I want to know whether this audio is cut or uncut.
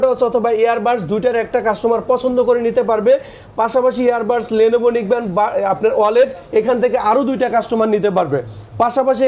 uncut